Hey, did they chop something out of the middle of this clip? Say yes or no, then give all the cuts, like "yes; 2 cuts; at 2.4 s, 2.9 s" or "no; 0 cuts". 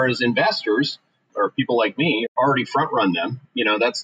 yes; 2 cuts; at 1.2 s, 2.3 s